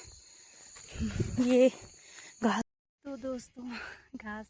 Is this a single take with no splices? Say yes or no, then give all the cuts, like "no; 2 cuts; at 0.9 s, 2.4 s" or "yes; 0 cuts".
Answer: no; 1 cut; at 2.7 s